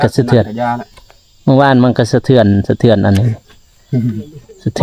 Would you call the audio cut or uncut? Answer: uncut